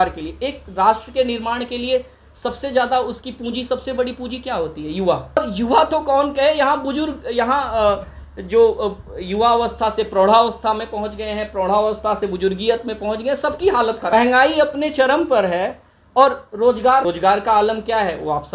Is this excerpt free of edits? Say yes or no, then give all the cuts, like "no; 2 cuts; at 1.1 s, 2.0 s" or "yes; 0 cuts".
no; 3 cuts; at 5.4 s, 14.1 s, 17.0 s